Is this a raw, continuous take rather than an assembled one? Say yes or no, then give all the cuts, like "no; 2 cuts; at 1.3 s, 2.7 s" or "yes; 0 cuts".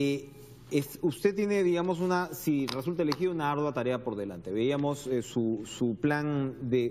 no; 1 cut; at 2.3 s